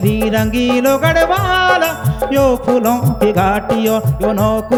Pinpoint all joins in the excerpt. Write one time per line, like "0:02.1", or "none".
none